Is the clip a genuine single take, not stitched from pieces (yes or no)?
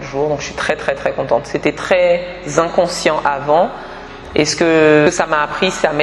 no